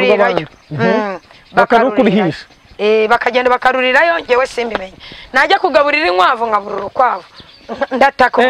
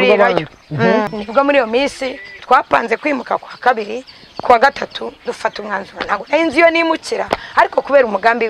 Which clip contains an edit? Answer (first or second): second